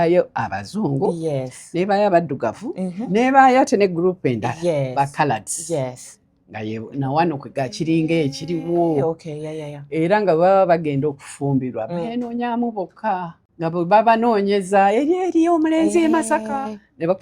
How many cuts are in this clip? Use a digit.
1